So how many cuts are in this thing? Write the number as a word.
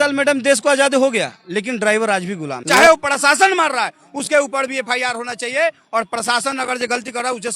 one